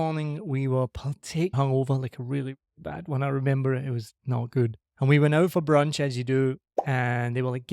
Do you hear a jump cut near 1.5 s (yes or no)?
yes